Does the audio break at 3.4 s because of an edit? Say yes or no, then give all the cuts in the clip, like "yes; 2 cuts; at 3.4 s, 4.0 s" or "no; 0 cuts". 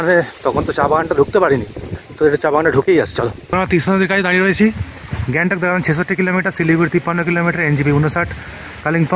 yes; 1 cut; at 3.4 s